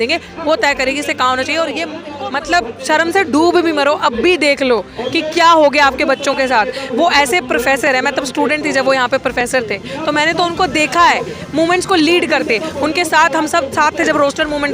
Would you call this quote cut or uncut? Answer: cut